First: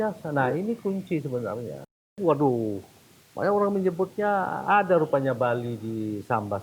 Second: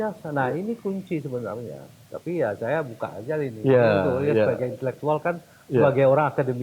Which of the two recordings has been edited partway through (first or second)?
first